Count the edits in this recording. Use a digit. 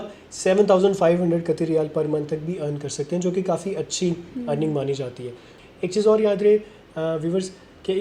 1